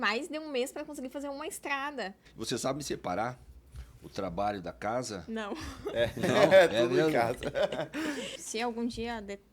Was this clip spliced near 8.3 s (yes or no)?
yes